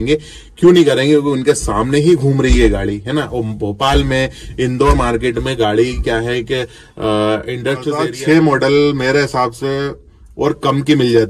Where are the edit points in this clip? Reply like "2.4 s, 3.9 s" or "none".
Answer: 8.0 s